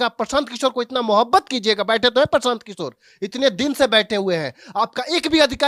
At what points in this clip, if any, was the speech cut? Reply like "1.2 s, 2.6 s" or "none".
none